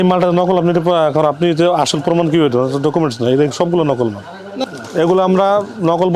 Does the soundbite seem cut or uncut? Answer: cut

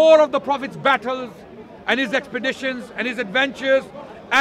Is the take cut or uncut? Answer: uncut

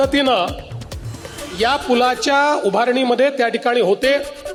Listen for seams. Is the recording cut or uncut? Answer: uncut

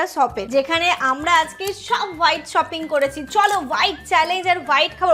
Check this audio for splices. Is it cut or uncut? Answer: uncut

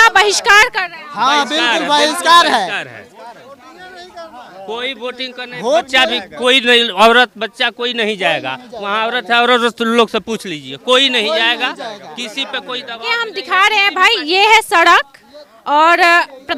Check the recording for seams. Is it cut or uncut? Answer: uncut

